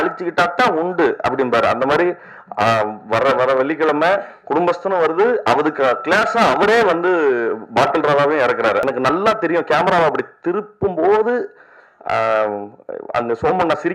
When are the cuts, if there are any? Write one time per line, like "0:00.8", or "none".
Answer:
0:08.8